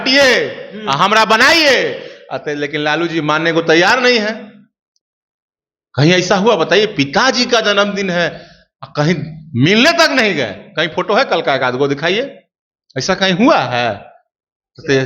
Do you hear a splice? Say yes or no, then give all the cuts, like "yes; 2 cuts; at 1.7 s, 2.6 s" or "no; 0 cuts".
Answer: no; 0 cuts